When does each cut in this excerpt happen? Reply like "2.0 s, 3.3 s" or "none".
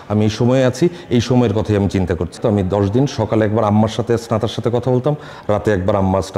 2.3 s